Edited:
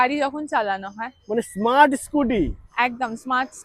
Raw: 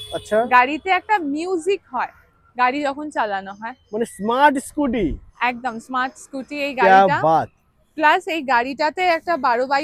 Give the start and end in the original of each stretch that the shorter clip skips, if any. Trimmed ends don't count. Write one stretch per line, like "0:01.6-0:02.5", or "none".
none